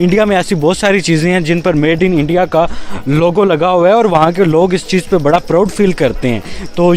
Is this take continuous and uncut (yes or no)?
yes